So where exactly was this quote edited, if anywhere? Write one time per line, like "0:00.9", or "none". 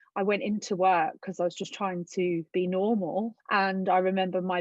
0:02.5
0:03.4

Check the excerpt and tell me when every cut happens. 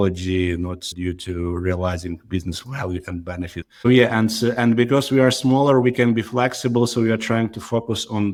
none

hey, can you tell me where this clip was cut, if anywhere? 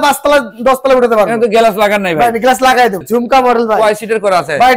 0:03.0

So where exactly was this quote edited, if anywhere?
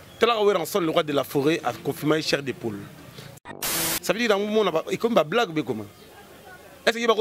0:03.4

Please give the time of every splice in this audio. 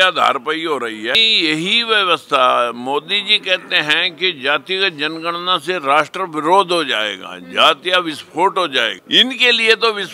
0:01.2
0:09.0

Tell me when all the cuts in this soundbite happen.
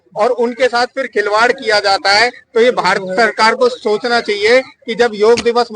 none

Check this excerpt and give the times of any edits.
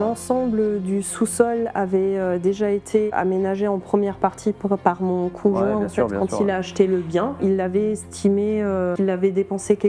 none

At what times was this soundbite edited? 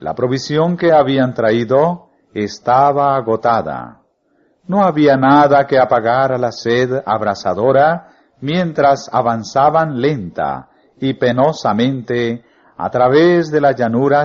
0:01.0

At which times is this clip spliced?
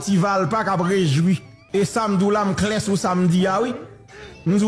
0:01.5

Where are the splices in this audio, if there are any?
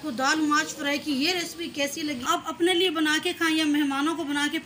0:02.3

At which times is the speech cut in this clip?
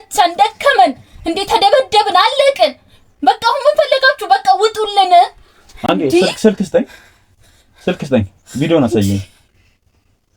none

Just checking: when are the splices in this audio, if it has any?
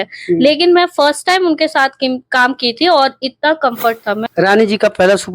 0:04.3

